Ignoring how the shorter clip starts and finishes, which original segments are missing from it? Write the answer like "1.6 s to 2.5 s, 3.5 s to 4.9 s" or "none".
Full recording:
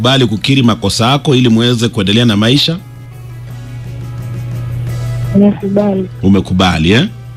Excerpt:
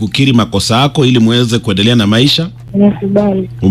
2.9 s to 5.2 s